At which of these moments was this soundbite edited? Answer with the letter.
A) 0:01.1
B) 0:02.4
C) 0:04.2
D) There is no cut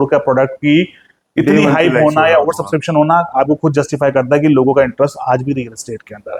D